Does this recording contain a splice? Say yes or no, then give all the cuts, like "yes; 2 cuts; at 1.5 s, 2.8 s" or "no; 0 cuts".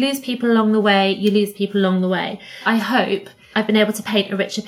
yes; 1 cut; at 2.6 s